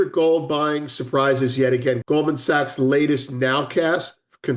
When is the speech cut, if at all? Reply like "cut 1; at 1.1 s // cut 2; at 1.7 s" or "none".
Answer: cut 1; at 2.0 s

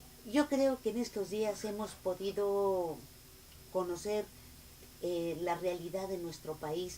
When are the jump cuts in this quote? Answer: cut 1; at 5.1 s

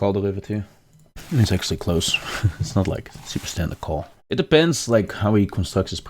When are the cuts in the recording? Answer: cut 1; at 1.2 s // cut 2; at 4.2 s

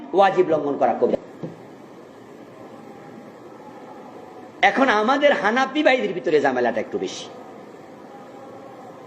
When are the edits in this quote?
cut 1; at 1.1 s

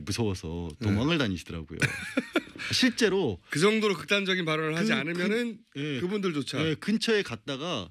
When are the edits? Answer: cut 1; at 1.2 s

